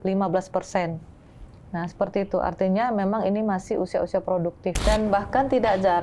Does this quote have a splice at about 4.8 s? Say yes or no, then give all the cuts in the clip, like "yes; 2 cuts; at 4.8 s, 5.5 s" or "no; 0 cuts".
yes; 1 cut; at 4.8 s